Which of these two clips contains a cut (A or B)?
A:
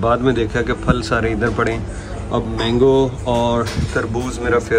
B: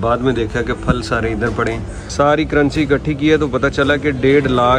B